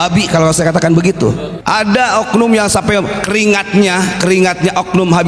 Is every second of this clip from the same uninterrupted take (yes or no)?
no